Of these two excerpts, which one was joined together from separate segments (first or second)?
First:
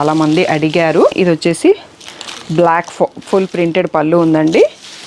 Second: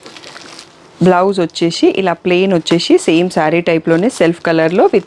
first